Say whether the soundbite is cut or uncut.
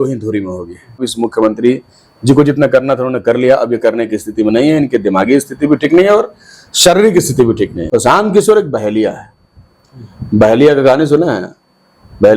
cut